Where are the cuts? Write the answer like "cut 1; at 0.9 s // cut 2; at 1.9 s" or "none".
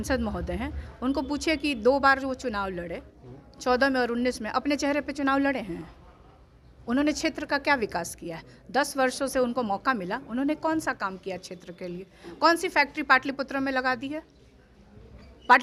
none

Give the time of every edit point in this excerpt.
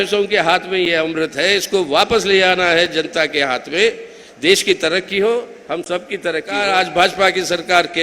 cut 1; at 6.5 s

